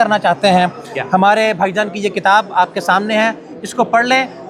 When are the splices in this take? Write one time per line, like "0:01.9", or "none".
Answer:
none